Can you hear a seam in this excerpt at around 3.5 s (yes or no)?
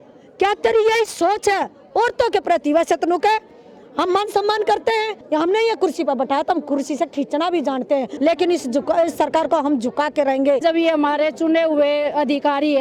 no